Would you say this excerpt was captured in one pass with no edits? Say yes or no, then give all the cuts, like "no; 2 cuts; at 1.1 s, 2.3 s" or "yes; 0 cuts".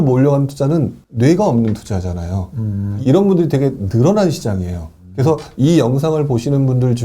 no; 2 cuts; at 1.0 s, 2.9 s